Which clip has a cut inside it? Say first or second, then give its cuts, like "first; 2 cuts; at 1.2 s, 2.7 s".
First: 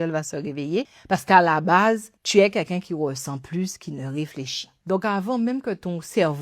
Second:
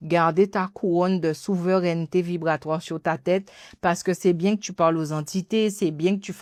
first; 3 cuts; at 1.0 s, 2.1 s, 4.7 s